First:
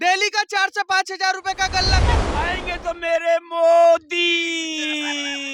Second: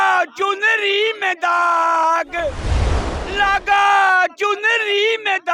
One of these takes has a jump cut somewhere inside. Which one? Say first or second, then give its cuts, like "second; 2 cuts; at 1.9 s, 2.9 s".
first; 1 cut; at 2.2 s